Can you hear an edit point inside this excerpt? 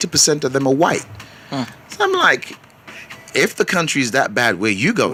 no; 0 cuts

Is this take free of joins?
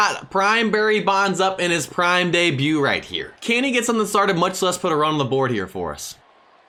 yes; 0 cuts

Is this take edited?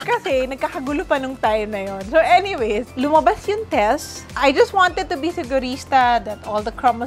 yes; 1 cut; at 4.4 s

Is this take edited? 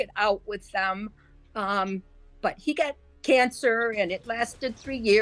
no; 0 cuts

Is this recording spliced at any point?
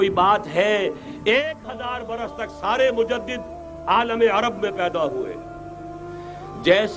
no; 0 cuts

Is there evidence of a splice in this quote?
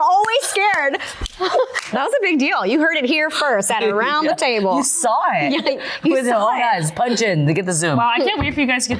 yes; 1 cut; at 1.9 s

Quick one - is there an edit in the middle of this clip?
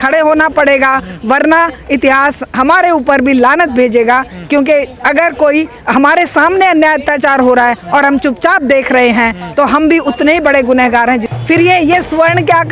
yes; 1 cut; at 11.3 s

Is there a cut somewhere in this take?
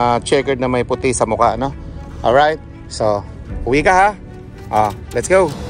no; 0 cuts

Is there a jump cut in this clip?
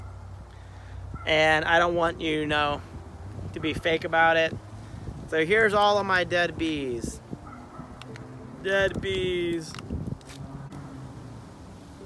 yes; 1 cut; at 10.7 s

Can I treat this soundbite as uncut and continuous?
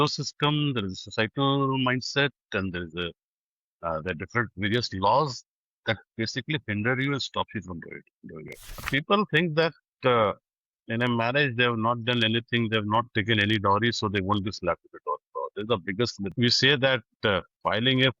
no; 2 cuts; at 8.9 s, 16.3 s

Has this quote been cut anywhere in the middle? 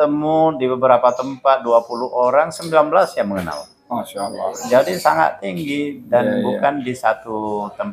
no; 0 cuts

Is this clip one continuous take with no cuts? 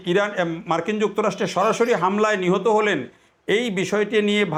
yes; 0 cuts

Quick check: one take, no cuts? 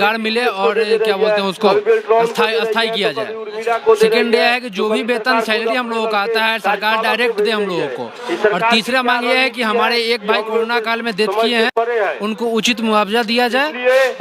yes; 0 cuts

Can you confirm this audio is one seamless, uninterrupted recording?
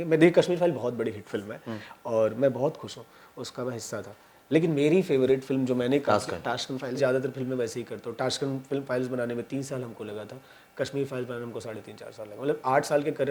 no; 1 cut; at 7.0 s

